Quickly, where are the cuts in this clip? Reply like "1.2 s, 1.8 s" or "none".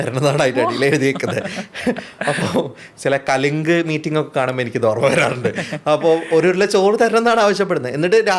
none